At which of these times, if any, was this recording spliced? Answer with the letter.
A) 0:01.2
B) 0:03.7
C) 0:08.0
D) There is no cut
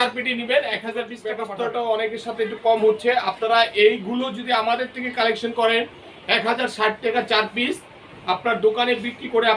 A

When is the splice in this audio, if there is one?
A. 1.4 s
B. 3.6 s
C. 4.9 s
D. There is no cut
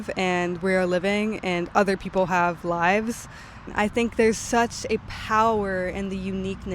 B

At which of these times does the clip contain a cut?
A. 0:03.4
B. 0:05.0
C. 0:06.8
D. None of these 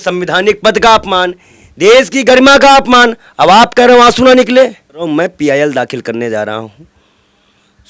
B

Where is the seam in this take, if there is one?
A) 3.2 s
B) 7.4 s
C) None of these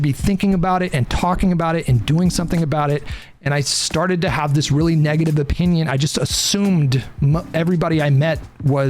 A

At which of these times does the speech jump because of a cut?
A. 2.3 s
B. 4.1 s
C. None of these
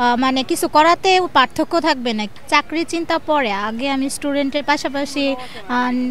A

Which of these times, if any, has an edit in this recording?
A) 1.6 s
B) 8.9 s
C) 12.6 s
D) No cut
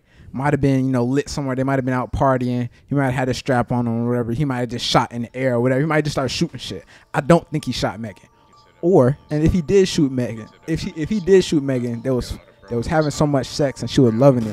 D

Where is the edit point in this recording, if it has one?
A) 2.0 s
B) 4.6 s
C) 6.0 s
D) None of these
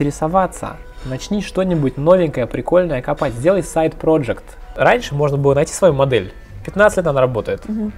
B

